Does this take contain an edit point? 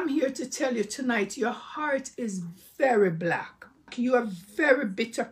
yes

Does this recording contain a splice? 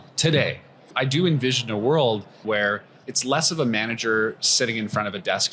yes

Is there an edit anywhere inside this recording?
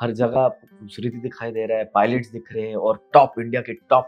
no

